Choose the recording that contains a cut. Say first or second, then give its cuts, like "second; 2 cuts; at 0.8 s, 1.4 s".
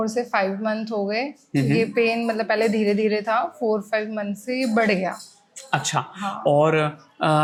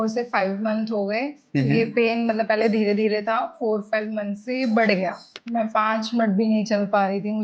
second; 1 cut; at 5.3 s